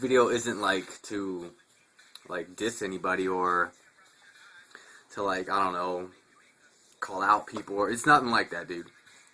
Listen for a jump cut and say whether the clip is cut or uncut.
cut